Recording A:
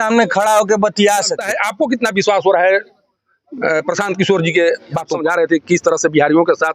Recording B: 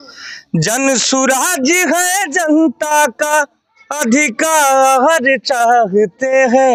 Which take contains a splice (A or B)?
A